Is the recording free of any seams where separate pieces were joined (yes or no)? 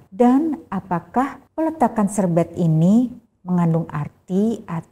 no